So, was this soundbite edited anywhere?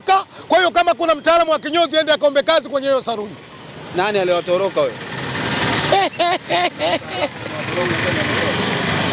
no; 0 cuts

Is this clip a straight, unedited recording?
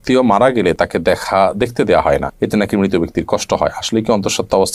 yes; 0 cuts

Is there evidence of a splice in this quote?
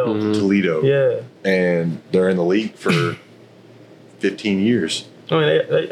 no; 0 cuts

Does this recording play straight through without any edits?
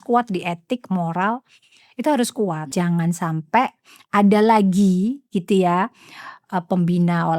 no; 1 cut; at 2.7 s

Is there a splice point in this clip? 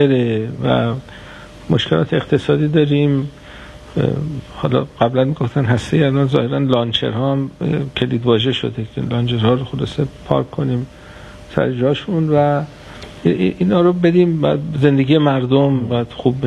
no; 0 cuts

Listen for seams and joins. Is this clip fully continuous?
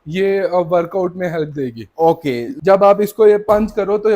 no; 1 cut; at 2.5 s

